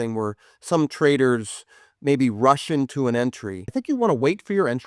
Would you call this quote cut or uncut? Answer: cut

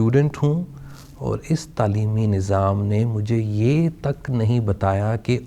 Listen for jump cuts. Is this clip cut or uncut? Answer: uncut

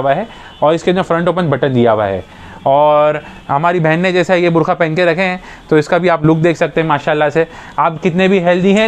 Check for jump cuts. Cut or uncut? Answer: uncut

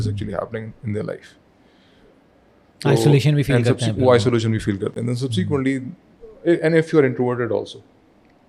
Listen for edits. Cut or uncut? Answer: uncut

